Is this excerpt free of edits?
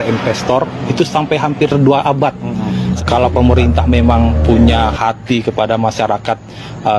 no; 1 cut; at 3.0 s

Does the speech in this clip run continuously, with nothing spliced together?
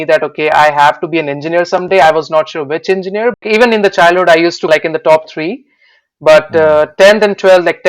no; 1 cut; at 3.4 s

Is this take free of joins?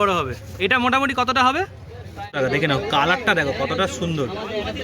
no; 1 cut; at 2.3 s

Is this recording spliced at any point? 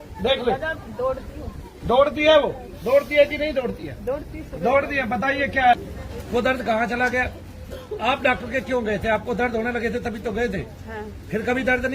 yes; 1 cut; at 5.7 s

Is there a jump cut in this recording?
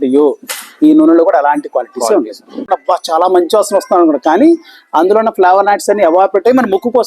yes; 1 cut; at 2.7 s

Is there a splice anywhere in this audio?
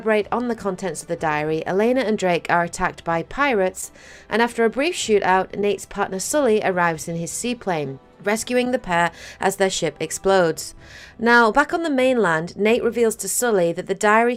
no; 0 cuts

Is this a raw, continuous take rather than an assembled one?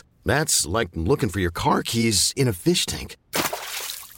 yes; 0 cuts

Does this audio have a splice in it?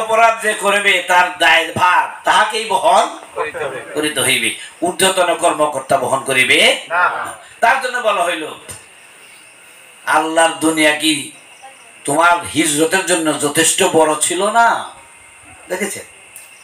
no; 0 cuts

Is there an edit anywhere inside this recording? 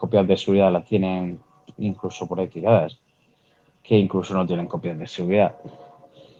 no; 0 cuts

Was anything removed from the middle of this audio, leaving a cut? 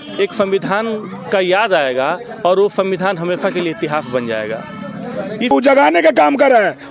yes; 1 cut; at 5.5 s

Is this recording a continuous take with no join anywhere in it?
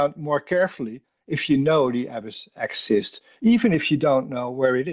yes; 0 cuts

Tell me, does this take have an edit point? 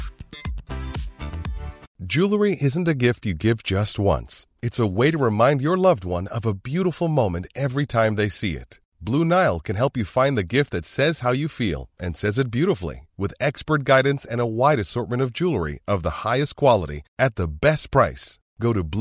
yes; 1 cut; at 1.8 s

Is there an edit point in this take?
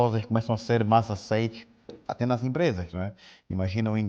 no; 0 cuts

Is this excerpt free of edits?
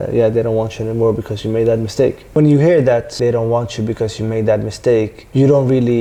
yes; 0 cuts

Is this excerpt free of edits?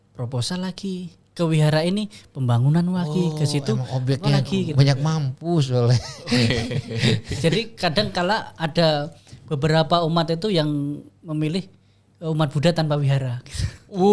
yes; 0 cuts

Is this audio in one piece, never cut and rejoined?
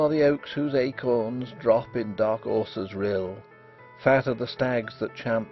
yes; 0 cuts

